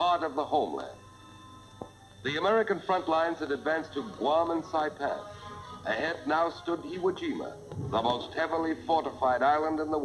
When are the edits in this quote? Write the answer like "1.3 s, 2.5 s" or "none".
none